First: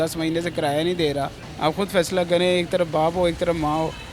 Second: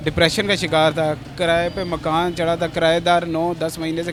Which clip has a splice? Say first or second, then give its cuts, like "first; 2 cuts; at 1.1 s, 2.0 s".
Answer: first; 1 cut; at 1.4 s